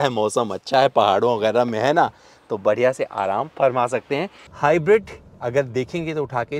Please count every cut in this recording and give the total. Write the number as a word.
one